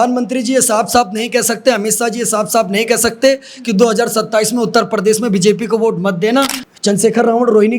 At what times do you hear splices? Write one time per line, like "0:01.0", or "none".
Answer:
0:06.6